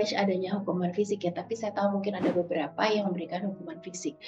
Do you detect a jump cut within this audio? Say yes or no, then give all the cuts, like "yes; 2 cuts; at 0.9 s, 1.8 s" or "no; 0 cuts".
no; 0 cuts